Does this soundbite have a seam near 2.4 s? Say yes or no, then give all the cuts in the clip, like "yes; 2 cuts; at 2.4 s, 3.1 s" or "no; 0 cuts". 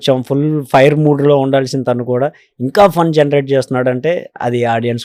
no; 0 cuts